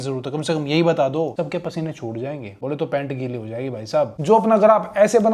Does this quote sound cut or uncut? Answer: cut